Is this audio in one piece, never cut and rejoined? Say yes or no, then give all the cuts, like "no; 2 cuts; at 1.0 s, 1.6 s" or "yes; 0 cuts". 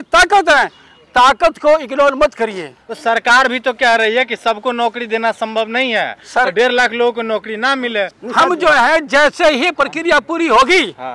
yes; 0 cuts